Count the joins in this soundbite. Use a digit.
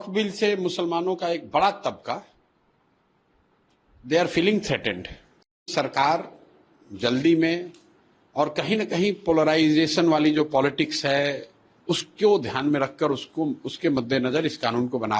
1